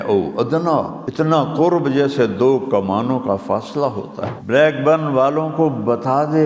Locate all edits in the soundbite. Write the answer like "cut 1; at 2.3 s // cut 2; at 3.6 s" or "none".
cut 1; at 1.0 s // cut 2; at 4.3 s

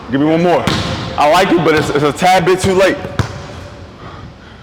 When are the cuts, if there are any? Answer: none

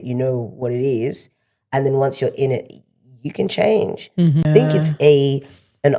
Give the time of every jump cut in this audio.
cut 1; at 4.4 s

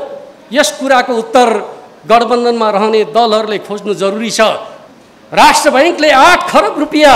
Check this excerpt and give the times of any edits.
cut 1; at 4.7 s

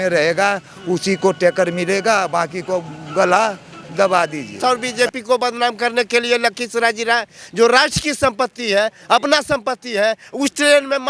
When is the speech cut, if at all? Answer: cut 1; at 4.6 s

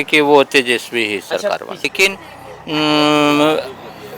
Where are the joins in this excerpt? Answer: cut 1; at 1.9 s

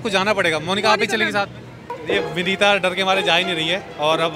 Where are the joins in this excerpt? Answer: cut 1; at 1.9 s

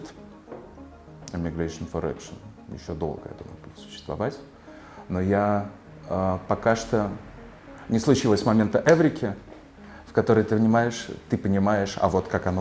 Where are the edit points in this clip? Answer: none

